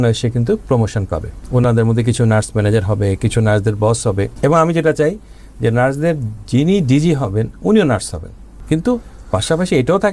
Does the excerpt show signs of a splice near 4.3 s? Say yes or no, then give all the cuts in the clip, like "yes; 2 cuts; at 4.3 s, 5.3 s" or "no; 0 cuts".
yes; 3 cuts; at 1.3 s, 4.3 s, 8.5 s